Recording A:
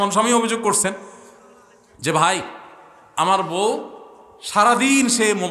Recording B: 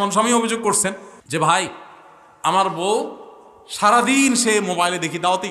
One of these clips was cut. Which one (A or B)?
B